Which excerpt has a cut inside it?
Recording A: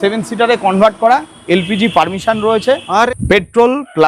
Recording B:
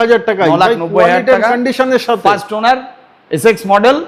A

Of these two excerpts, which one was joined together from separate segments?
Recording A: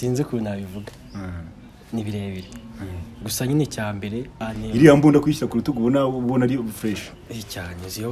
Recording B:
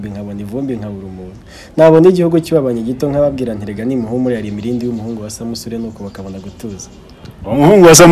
A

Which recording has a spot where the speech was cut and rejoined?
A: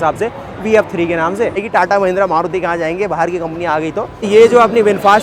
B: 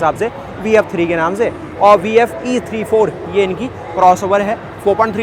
A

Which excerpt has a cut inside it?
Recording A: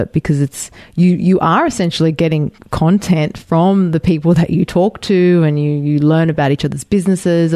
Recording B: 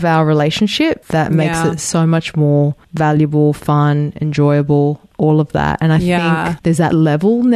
B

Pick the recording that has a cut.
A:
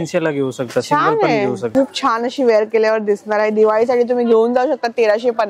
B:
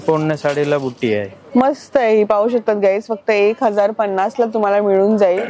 A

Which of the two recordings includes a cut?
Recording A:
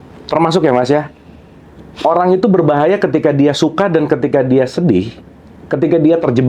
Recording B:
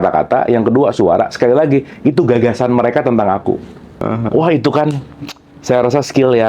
B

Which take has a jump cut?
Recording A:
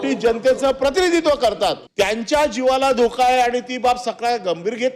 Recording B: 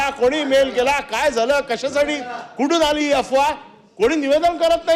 A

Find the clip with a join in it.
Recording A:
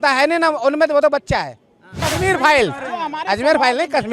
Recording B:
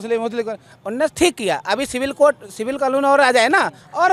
A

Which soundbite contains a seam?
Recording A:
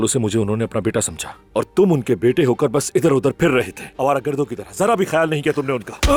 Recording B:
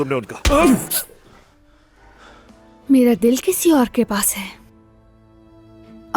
B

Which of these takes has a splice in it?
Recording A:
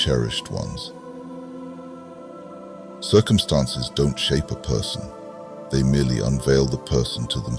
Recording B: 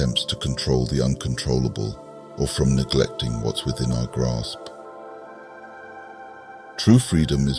A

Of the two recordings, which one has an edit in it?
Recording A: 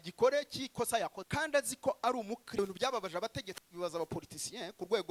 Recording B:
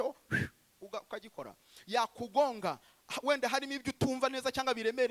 A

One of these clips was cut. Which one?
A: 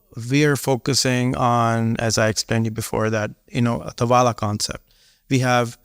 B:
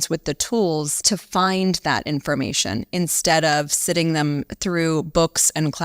B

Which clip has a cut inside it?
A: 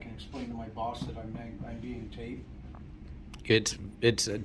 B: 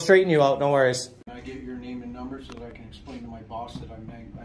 B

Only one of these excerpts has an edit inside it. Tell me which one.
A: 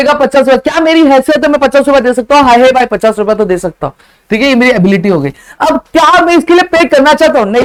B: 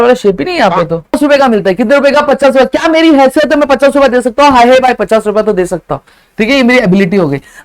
B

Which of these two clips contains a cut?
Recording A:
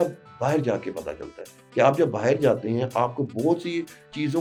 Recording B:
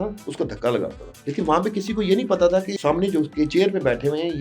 B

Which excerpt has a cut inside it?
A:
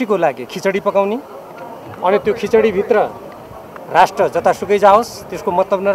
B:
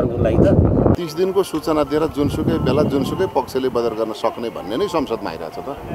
B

